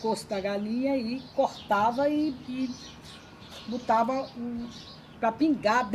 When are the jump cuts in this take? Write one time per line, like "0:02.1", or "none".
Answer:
none